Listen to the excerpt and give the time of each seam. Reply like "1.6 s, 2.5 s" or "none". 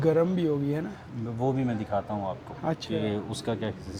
none